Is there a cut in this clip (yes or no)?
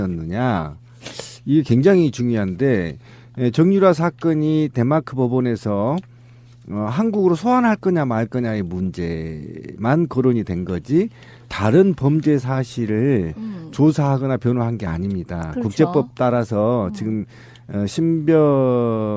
no